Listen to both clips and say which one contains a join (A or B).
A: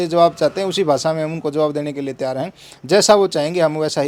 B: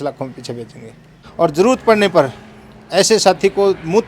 B